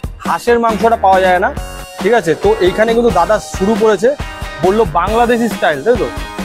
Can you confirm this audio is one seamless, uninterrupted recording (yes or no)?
yes